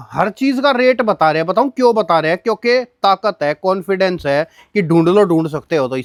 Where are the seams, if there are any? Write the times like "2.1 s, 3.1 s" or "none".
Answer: none